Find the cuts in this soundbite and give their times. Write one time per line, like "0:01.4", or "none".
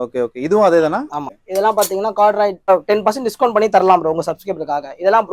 0:01.2
0:02.7